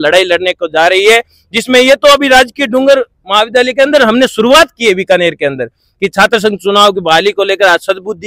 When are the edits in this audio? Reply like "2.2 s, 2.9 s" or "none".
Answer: none